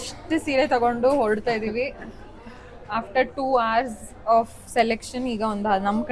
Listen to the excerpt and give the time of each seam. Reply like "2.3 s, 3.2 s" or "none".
none